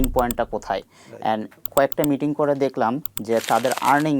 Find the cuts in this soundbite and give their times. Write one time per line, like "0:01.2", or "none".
0:01.6
0:03.0

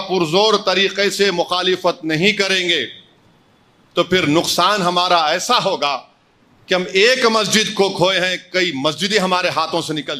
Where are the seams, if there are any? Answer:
none

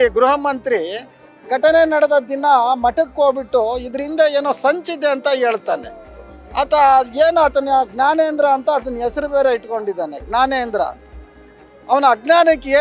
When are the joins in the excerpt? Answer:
none

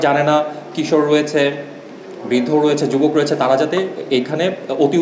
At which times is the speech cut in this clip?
none

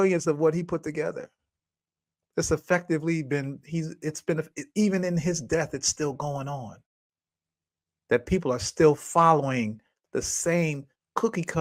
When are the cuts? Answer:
none

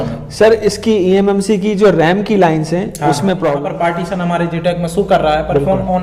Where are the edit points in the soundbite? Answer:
0:03.6

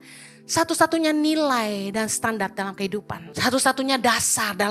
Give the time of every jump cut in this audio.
0:03.2

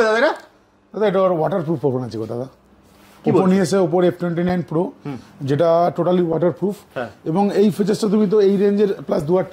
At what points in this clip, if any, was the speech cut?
none

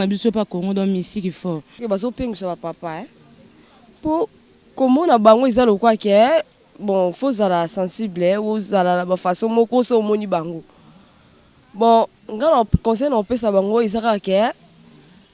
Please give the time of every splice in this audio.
0:01.8

